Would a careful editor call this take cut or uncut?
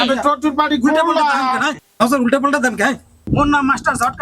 cut